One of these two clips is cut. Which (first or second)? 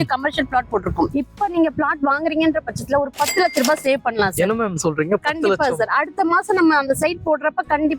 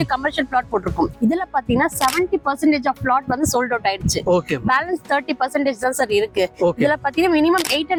first